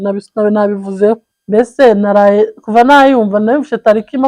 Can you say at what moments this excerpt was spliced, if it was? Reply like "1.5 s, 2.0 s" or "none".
1.3 s